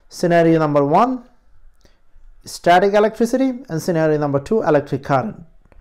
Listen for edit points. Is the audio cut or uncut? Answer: uncut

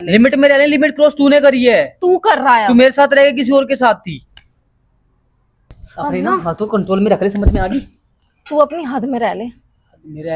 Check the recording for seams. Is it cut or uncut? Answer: cut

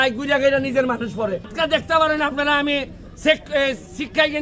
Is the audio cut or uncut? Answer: cut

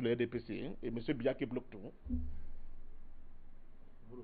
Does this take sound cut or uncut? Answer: cut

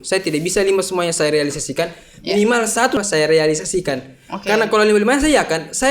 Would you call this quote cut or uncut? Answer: cut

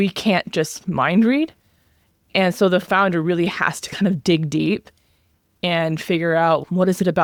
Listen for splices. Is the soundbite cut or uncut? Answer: uncut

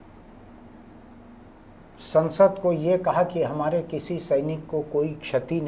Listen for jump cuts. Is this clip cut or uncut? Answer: uncut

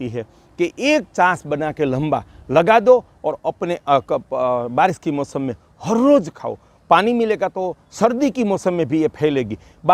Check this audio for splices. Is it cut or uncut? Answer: uncut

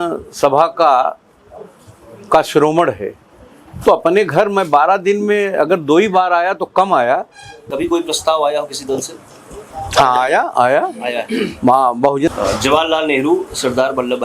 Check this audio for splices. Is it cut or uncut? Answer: cut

